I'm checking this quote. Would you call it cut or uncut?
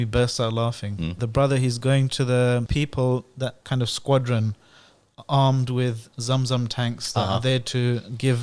cut